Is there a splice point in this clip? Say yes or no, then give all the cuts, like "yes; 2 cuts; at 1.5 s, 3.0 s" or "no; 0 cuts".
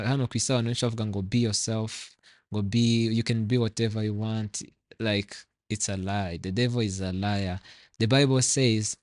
no; 0 cuts